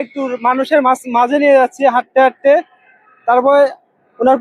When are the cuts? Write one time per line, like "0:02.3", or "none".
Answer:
none